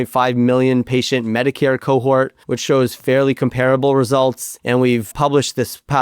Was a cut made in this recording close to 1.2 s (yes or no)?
no